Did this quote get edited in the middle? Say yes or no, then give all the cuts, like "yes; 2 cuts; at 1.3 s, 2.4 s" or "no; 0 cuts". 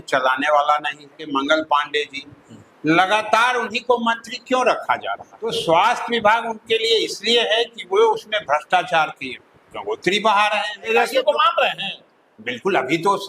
yes; 3 cuts; at 1.3 s, 5.5 s, 10.9 s